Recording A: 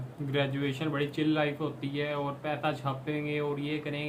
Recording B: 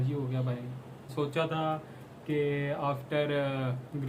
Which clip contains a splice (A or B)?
B